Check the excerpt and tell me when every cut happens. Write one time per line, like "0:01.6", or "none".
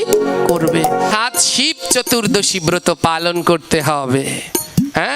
0:01.1